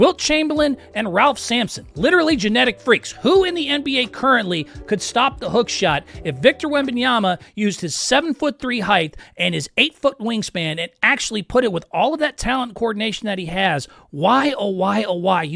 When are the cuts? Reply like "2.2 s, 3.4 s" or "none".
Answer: none